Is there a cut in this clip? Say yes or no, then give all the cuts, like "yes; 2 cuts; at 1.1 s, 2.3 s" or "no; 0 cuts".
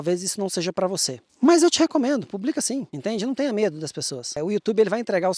yes; 3 cuts; at 1.3 s, 2.9 s, 4.4 s